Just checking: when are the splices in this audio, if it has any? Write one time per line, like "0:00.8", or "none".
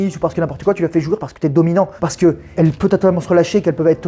0:02.5